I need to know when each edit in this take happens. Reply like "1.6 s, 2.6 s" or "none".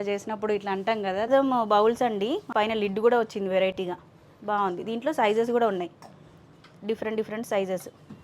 1.3 s, 2.5 s